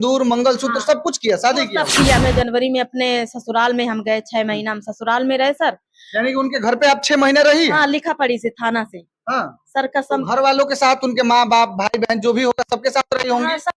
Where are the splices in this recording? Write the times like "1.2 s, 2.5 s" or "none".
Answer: 2.2 s